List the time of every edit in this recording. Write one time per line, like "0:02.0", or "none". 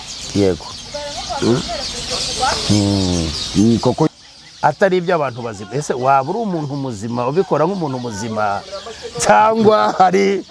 0:04.1